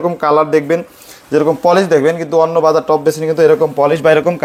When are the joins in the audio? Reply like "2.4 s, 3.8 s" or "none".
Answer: none